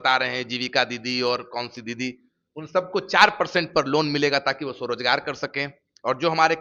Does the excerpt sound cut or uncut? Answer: uncut